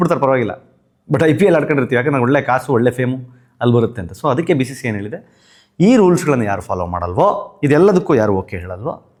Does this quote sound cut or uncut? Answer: uncut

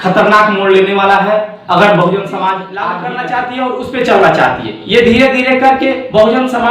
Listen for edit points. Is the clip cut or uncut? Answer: cut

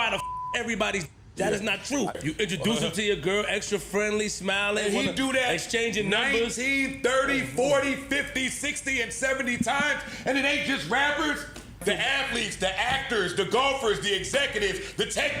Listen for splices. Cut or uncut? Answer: uncut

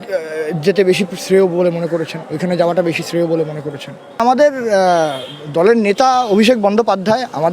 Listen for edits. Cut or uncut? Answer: cut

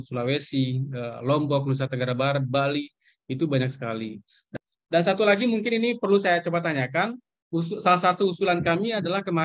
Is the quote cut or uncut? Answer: cut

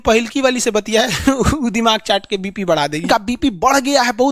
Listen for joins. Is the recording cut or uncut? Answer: cut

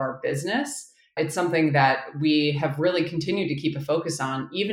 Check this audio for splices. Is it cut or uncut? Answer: cut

